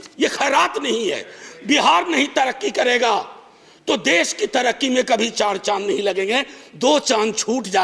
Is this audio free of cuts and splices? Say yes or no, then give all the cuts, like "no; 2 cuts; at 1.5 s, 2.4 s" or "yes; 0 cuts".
yes; 0 cuts